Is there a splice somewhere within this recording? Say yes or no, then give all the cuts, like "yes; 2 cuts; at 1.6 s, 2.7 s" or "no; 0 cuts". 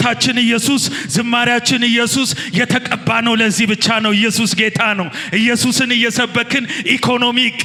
no; 0 cuts